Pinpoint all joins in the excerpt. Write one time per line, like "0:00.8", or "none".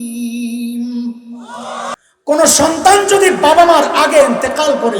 0:01.9